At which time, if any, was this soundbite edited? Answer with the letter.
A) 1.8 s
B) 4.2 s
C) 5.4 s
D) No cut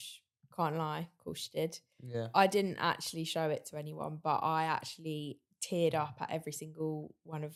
D